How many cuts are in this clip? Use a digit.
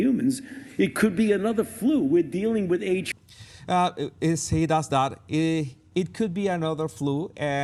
0